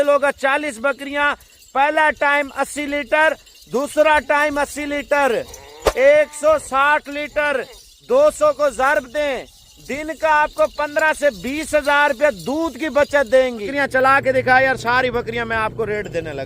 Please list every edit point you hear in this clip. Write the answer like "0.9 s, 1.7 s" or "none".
13.7 s